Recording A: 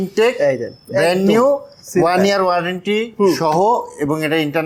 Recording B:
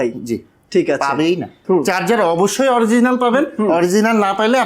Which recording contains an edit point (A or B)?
B